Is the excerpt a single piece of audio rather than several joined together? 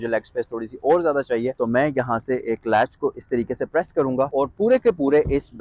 no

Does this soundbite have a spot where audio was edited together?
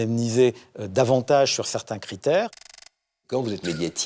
yes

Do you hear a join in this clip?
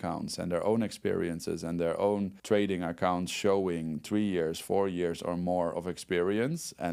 no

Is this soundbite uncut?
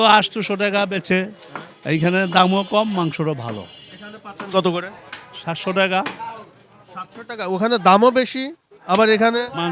yes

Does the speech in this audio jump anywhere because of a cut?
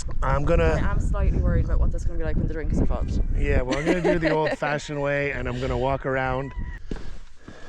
yes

